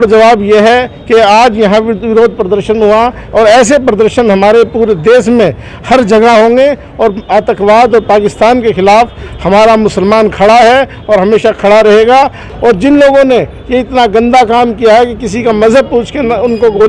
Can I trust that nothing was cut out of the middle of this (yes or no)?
no